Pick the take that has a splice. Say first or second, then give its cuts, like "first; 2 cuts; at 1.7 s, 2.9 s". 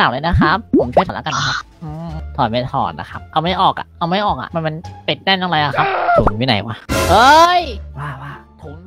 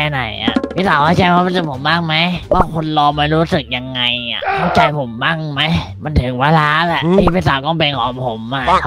first; 1 cut; at 1.1 s